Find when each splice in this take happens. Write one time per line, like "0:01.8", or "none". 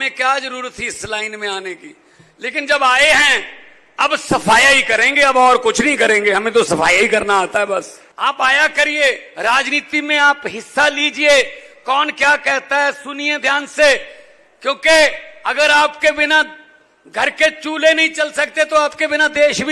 0:08.0